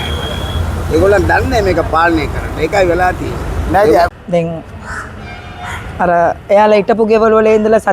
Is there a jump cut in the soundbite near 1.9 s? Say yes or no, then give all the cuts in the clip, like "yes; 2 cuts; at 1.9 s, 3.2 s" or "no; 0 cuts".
no; 1 cut; at 4.1 s